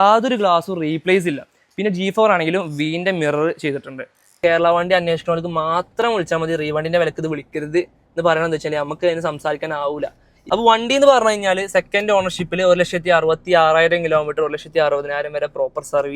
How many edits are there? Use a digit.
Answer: 2